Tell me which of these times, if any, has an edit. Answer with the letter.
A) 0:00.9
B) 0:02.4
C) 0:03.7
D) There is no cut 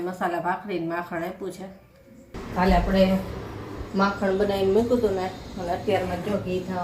B